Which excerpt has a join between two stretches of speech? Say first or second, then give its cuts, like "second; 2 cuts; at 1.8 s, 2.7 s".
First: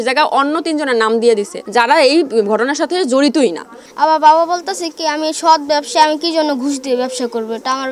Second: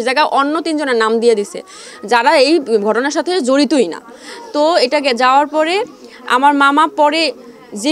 first; 2 cuts; at 1.6 s, 3.8 s